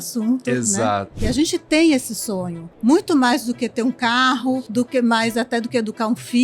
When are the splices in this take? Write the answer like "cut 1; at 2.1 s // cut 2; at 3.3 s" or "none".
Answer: cut 1; at 1.1 s